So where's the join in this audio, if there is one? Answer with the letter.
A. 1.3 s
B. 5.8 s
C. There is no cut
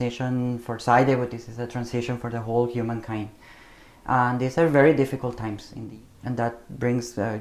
B